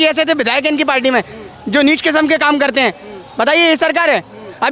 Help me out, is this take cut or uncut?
uncut